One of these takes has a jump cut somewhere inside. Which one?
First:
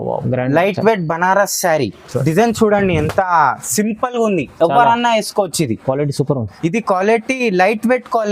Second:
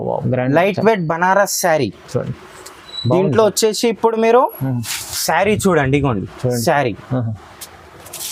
first; 1 cut; at 2.1 s

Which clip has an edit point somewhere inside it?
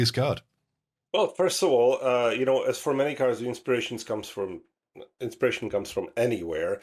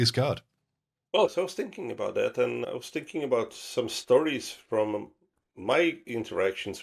second; 2 cuts; at 1.3 s, 2.6 s

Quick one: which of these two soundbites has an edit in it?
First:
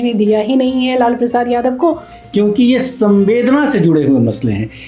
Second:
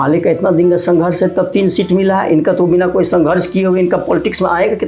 first; 1 cut; at 2.1 s

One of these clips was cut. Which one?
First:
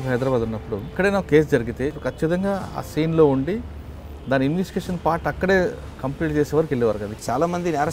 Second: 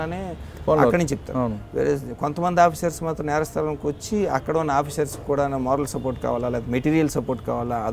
first; 3 cuts; at 0.9 s, 2.0 s, 7.2 s

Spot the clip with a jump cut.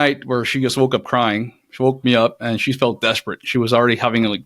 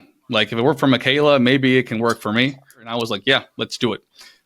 second; 1 cut; at 2.9 s

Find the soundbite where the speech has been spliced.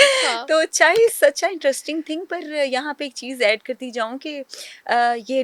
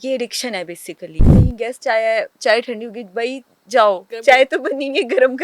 second; 2 cuts; at 1.3 s, 4.1 s

